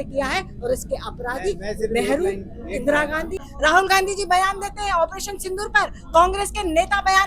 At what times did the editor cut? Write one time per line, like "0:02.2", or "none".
0:03.5